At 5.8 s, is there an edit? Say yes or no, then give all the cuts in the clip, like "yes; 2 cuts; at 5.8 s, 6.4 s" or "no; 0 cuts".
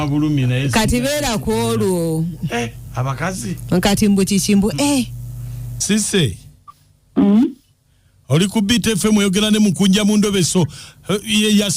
yes; 1 cut; at 5.8 s